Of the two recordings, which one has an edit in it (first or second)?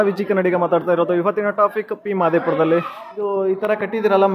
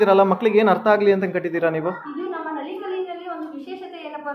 first